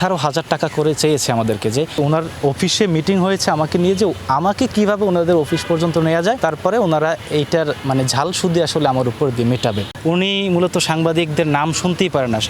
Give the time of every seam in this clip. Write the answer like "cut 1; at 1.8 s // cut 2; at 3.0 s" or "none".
cut 1; at 2.0 s // cut 2; at 6.4 s // cut 3; at 9.9 s